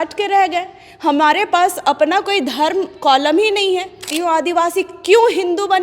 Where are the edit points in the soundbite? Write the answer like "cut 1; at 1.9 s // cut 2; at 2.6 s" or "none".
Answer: cut 1; at 4.1 s

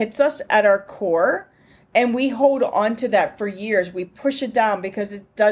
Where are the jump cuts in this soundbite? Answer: none

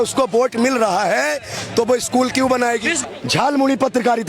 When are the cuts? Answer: cut 1; at 3.0 s

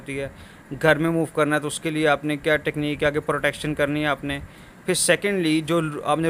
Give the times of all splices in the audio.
none

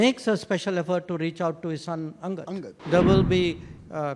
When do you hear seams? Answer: cut 1; at 2.7 s

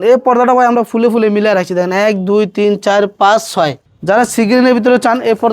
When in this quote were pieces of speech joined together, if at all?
cut 1; at 3.9 s

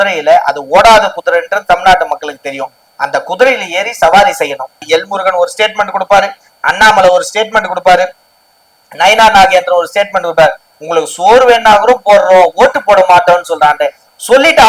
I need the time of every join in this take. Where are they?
cut 1; at 4.8 s // cut 2; at 10.7 s

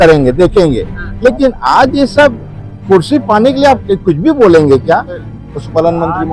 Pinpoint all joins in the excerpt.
cut 1; at 5.2 s

